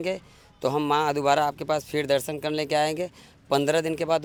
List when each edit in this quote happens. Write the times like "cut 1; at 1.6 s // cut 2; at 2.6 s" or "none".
none